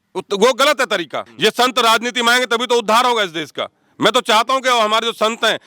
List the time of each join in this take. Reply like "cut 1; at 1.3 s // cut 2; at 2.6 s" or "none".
cut 1; at 1.2 s